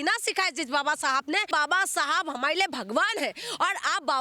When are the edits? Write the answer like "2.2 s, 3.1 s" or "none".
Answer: 1.5 s

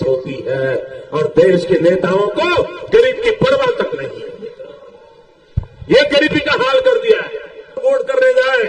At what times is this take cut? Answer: none

